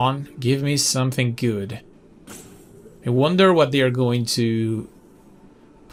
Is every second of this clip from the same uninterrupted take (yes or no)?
yes